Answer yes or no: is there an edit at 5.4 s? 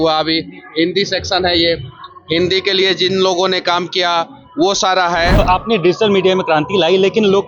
yes